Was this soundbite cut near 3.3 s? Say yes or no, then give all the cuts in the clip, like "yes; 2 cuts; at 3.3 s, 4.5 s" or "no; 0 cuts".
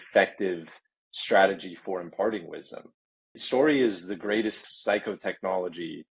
yes; 2 cuts; at 3.3 s, 4.7 s